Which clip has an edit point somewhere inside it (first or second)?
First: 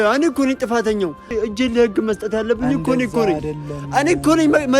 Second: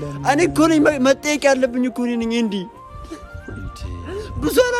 first